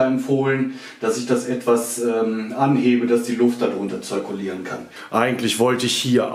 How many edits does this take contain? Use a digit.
1